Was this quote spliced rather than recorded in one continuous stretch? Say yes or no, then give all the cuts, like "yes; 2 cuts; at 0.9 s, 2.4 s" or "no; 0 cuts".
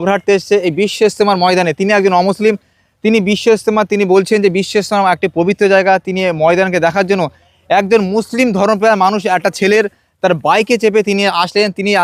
no; 0 cuts